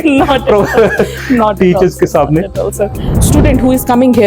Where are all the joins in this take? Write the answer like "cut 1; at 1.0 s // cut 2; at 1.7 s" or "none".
cut 1; at 3.1 s